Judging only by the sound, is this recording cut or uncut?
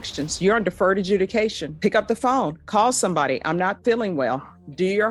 uncut